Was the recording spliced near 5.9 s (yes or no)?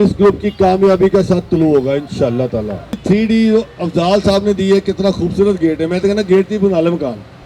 no